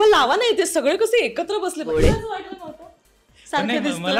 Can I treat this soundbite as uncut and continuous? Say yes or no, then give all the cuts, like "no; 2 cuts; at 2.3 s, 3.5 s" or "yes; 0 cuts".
no; 1 cut; at 1.9 s